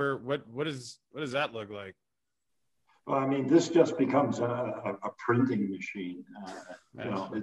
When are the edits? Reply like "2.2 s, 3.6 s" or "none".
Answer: none